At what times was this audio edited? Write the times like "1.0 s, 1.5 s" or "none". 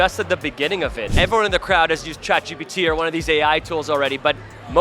1.0 s